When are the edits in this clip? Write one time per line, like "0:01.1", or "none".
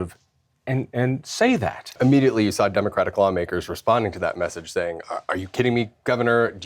0:01.9